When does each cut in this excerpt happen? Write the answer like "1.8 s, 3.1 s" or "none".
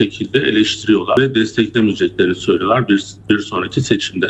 1.2 s